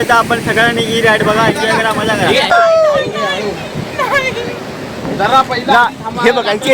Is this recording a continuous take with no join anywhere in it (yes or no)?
no